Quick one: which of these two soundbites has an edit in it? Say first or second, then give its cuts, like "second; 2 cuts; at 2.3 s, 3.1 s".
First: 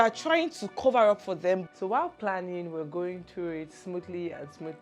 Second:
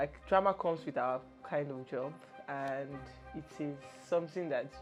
first; 1 cut; at 1.6 s